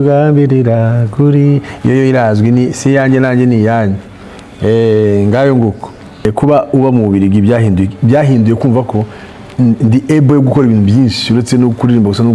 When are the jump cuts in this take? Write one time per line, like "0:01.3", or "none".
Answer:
0:06.2

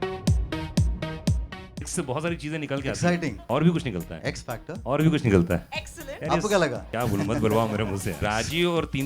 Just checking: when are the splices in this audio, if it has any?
0:01.5

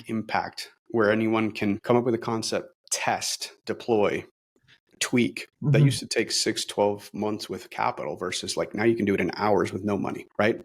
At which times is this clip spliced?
0:01.8

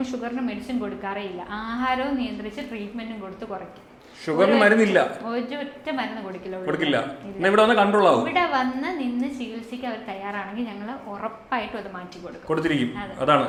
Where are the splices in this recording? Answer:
none

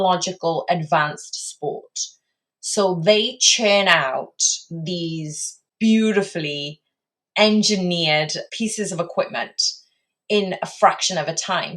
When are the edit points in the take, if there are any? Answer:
0:05.6
0:08.4

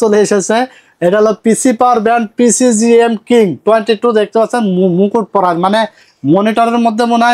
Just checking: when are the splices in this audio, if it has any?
none

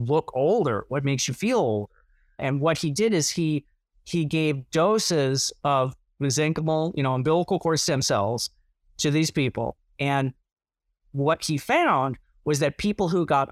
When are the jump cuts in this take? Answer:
0:02.4

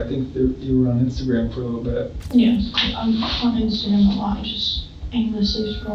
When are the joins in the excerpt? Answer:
0:02.2

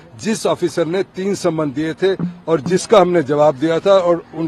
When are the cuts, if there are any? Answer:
none

